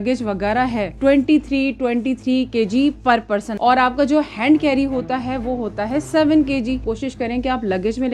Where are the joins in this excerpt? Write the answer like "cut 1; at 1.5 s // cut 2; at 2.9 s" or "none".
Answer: cut 1; at 1.0 s // cut 2; at 3.5 s // cut 3; at 6.8 s